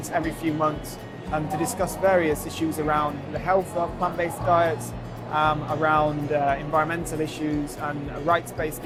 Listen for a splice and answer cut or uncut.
uncut